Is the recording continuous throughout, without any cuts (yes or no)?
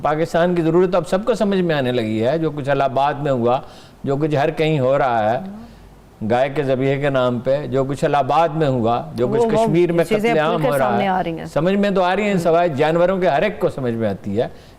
yes